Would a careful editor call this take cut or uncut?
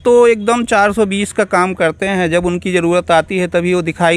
uncut